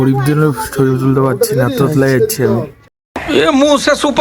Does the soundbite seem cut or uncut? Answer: cut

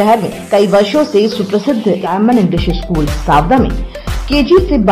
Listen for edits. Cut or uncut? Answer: cut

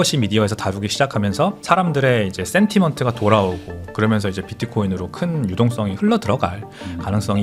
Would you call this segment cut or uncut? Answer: uncut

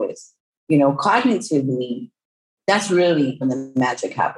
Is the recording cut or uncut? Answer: cut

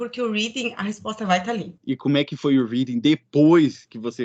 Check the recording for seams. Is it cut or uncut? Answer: cut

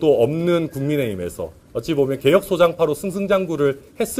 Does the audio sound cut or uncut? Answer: uncut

